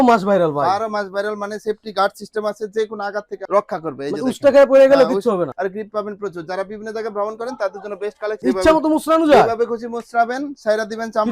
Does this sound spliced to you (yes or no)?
yes